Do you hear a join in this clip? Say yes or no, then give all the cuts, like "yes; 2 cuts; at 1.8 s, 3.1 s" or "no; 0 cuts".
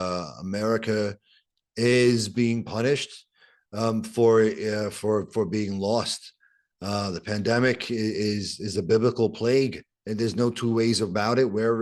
no; 0 cuts